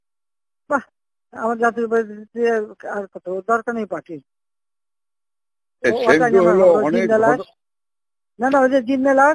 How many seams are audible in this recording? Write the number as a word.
zero